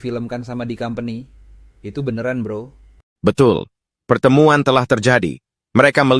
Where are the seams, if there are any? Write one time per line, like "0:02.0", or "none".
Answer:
none